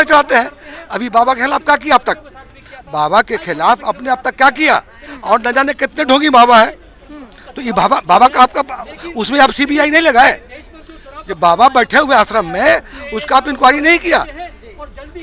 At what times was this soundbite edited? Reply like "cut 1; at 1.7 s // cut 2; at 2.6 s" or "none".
none